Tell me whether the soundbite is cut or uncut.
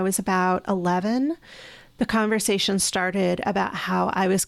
uncut